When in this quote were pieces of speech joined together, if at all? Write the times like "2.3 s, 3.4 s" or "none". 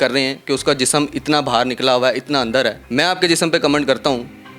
2.8 s

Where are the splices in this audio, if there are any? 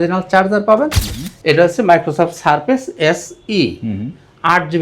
0.9 s

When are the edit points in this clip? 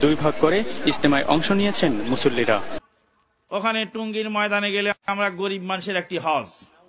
2.8 s

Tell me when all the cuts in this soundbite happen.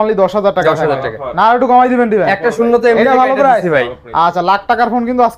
none

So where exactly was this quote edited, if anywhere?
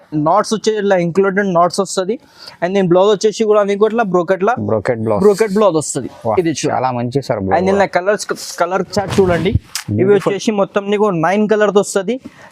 none

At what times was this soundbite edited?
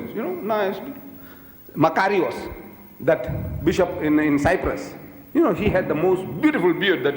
6.2 s

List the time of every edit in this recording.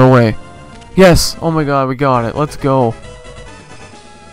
2.9 s

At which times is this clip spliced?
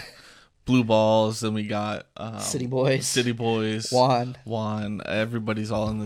none

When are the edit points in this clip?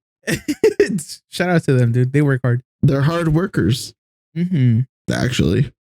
2.7 s

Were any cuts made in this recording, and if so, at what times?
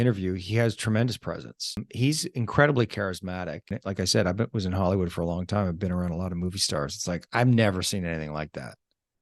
1.8 s, 3.7 s

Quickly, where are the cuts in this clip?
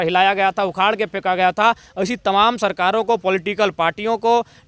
none

